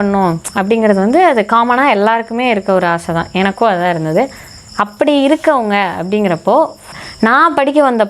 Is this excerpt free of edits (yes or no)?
no